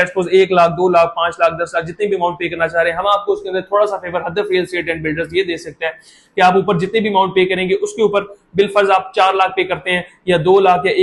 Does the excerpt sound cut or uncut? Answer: uncut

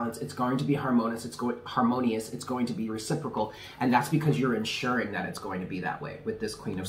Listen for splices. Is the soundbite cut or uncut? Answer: uncut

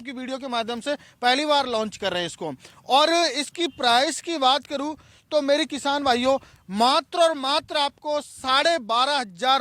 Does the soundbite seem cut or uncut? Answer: uncut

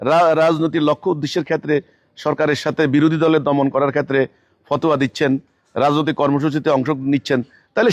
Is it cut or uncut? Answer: uncut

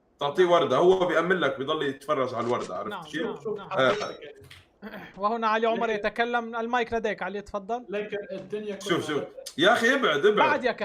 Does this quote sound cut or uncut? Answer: uncut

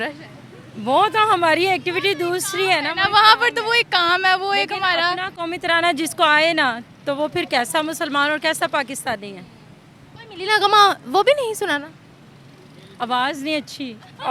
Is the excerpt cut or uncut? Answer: uncut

